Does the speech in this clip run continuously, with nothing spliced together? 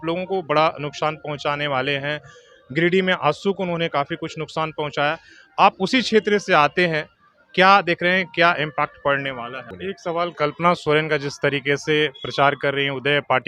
no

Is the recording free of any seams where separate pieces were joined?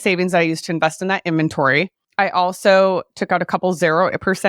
no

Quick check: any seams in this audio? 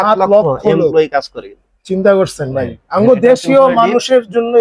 no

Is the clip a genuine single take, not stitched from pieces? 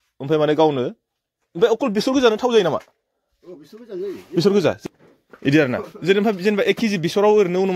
no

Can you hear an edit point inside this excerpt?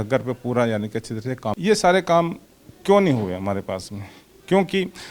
yes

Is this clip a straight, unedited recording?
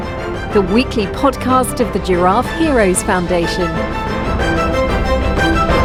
yes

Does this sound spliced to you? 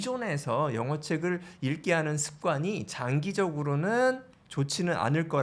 no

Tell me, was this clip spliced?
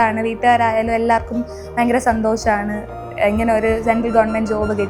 no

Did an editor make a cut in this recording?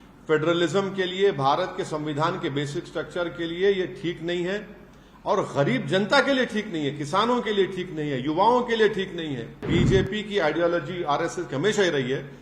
yes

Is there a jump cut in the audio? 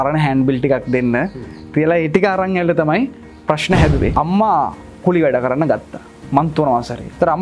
yes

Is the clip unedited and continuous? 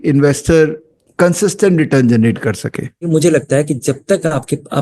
no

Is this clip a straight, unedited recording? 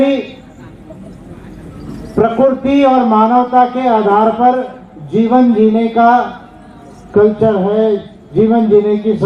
yes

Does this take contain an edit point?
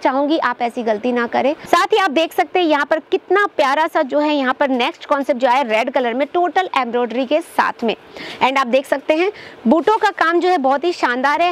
yes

